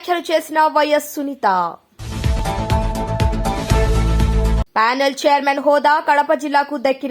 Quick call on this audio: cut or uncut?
uncut